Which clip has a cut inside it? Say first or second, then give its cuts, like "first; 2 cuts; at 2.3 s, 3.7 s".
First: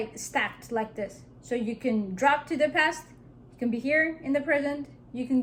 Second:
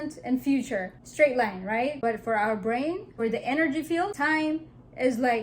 second; 4 cuts; at 1.0 s, 2.0 s, 3.1 s, 4.1 s